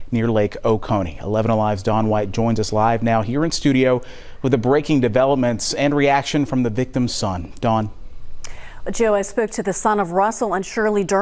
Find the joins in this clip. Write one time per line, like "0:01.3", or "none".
none

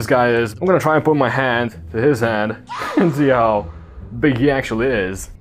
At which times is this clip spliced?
none

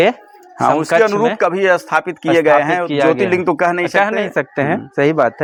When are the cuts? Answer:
none

